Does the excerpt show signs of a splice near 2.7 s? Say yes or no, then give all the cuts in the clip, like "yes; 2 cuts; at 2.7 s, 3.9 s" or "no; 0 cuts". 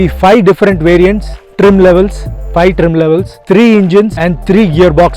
no; 1 cut; at 4.2 s